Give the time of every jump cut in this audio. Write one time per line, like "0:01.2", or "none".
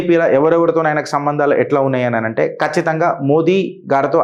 none